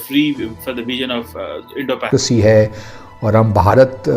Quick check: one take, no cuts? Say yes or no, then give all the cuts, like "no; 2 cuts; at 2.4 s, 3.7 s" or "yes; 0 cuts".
no; 1 cut; at 2.1 s